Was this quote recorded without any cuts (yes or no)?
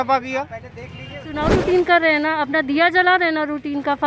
no